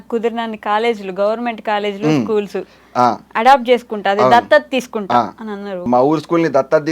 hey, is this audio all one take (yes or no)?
no